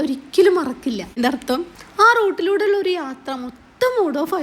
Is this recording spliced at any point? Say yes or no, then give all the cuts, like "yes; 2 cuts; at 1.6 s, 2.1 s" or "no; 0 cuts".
yes; 1 cut; at 1.2 s